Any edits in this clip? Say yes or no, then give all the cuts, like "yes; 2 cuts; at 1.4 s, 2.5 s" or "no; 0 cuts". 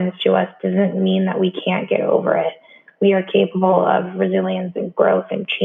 no; 0 cuts